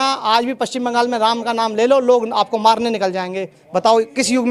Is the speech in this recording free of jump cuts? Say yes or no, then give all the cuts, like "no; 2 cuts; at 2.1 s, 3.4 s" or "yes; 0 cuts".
yes; 0 cuts